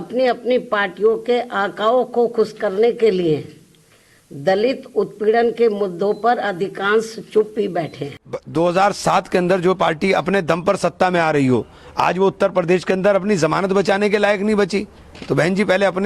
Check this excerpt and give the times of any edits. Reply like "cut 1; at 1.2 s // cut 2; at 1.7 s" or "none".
cut 1; at 8.3 s